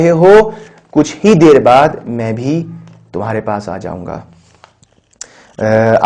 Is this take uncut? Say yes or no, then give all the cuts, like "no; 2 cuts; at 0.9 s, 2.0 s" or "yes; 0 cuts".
yes; 0 cuts